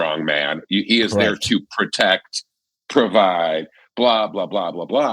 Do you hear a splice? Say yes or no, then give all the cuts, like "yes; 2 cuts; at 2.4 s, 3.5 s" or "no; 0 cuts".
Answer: no; 0 cuts